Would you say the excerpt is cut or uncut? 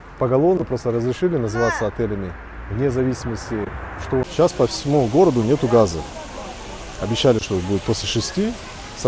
cut